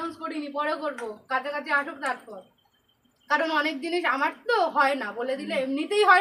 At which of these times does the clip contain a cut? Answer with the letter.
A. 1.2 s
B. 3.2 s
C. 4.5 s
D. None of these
D